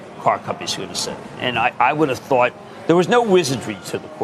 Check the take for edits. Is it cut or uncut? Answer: uncut